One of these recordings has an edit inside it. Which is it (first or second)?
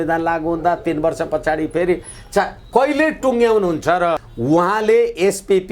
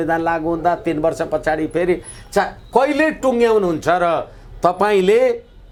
first